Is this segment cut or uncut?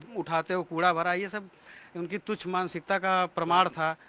uncut